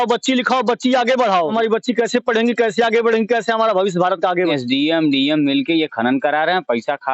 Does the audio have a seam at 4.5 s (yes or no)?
yes